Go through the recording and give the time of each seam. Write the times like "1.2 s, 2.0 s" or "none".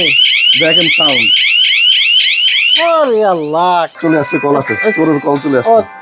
3.9 s